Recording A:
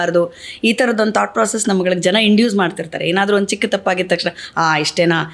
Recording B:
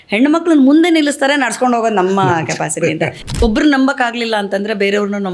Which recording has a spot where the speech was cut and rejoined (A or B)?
B